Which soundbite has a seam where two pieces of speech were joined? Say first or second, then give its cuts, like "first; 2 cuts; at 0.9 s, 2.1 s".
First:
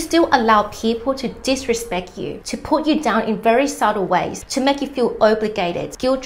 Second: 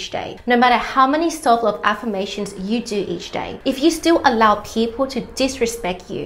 first; 1 cut; at 4.4 s